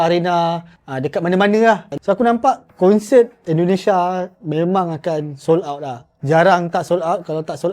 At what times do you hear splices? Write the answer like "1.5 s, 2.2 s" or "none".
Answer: 1.9 s